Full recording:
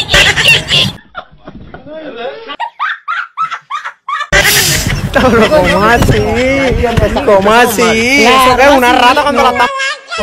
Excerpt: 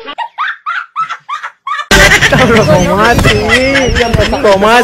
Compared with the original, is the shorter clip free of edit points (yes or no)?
no